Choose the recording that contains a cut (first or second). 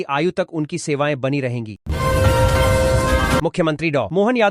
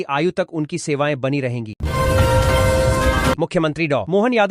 second